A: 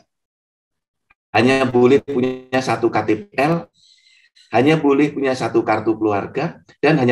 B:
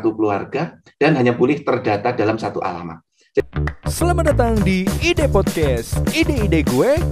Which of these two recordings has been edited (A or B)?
B